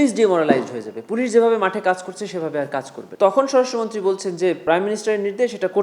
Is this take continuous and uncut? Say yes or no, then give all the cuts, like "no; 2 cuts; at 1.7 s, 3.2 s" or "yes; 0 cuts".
no; 2 cuts; at 3.0 s, 4.6 s